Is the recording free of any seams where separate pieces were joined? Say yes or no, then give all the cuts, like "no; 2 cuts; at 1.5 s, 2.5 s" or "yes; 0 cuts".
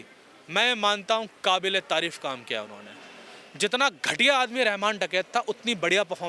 yes; 0 cuts